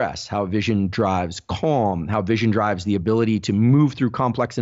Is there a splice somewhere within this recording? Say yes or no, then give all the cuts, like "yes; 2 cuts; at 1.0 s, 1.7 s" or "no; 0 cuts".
no; 0 cuts